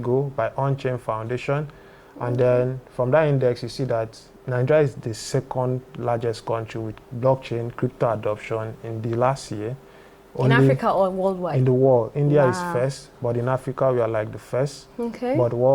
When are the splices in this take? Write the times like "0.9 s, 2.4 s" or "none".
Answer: none